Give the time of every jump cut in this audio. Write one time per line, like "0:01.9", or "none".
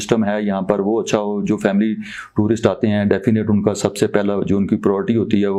none